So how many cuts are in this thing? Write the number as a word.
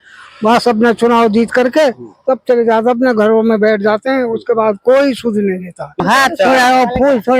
one